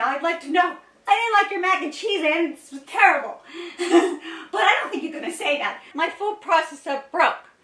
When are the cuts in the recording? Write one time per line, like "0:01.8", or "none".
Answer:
0:05.9